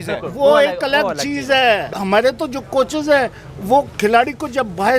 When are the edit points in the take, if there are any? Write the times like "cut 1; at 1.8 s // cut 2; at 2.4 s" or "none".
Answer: cut 1; at 1.9 s